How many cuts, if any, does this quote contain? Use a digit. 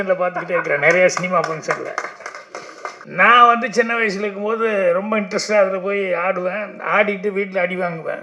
1